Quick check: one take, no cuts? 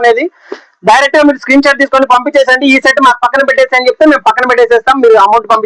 yes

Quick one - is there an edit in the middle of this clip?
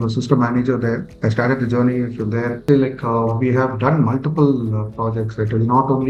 yes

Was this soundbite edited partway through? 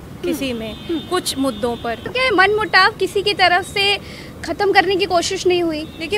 yes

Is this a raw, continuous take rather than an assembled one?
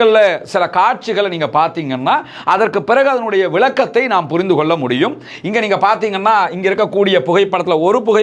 yes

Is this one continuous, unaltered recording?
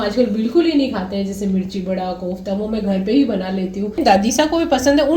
no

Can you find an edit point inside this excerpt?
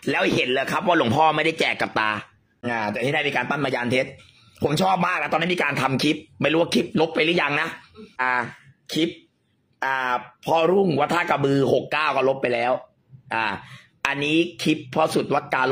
yes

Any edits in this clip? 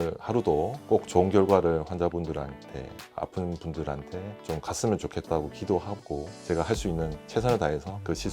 yes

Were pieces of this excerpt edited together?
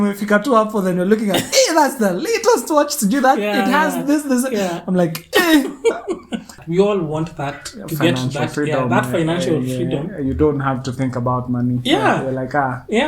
yes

